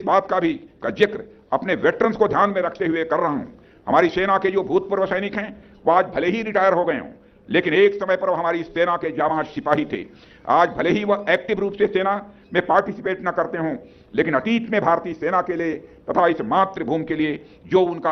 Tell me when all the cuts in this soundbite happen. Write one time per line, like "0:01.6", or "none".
none